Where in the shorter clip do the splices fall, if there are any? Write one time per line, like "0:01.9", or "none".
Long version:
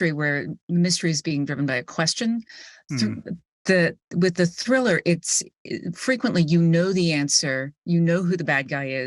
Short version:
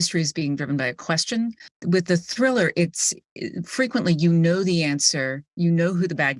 0:01.7